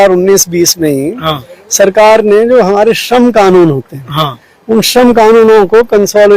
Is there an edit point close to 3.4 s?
no; 0 cuts

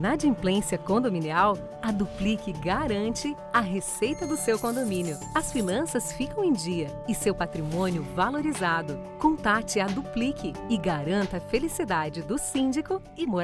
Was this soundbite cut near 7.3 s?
no; 0 cuts

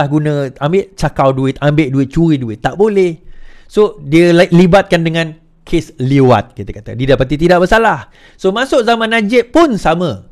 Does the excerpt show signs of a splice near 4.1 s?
no; 0 cuts

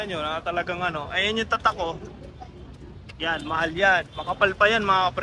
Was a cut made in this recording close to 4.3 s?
no; 0 cuts

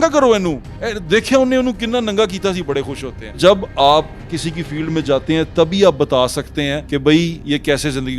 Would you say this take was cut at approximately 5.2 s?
no; 2 cuts; at 3.4 s, 6.8 s

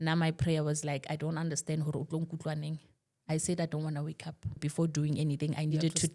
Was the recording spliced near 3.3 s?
no; 1 cut; at 4.6 s

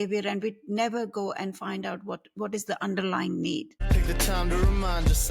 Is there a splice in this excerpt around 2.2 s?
no; 1 cut; at 3.8 s

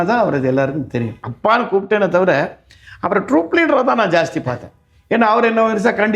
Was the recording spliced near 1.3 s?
yes; 1 cut; at 1.3 s

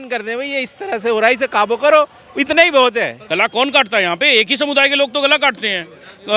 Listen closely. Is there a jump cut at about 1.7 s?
no; 1 cut; at 3.2 s

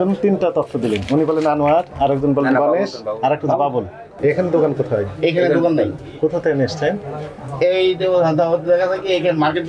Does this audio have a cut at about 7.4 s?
no; 1 cut; at 4.0 s

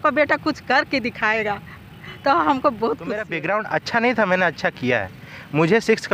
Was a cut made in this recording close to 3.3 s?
yes; 1 cut; at 3.3 s

